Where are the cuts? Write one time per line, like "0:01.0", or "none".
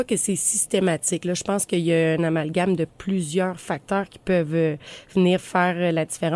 none